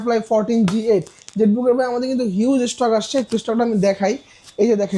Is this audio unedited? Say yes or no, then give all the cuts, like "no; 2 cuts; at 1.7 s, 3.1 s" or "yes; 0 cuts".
yes; 0 cuts